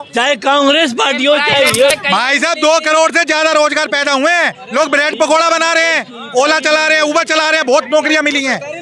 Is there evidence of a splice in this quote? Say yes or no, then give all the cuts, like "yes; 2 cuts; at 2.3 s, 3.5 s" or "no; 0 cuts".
yes; 1 cut; at 1.9 s